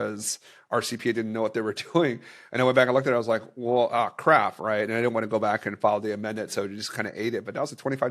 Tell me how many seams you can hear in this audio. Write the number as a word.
zero